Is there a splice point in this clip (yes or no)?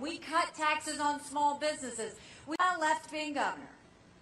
no